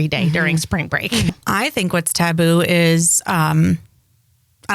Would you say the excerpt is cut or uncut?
cut